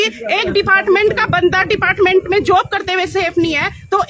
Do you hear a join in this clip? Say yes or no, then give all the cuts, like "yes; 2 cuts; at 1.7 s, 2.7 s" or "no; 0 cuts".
no; 0 cuts